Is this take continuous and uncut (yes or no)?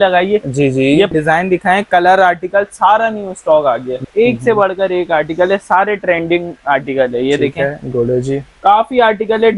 no